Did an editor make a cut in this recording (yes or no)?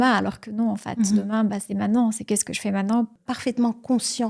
yes